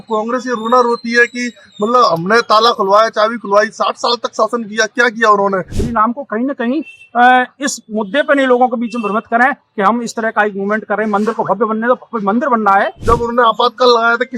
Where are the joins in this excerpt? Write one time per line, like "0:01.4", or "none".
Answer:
0:05.8
0:13.0